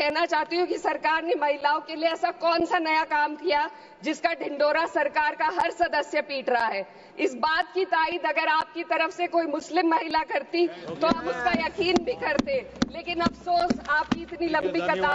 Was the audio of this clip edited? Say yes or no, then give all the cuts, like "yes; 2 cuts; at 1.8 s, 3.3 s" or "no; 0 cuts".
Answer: no; 0 cuts